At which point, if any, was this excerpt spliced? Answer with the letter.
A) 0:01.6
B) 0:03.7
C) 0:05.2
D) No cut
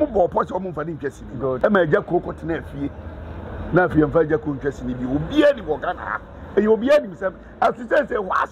A